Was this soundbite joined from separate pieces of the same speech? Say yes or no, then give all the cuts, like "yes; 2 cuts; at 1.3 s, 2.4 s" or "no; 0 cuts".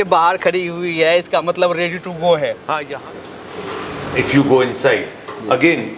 yes; 1 cut; at 2.9 s